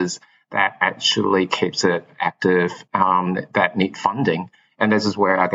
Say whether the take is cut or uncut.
uncut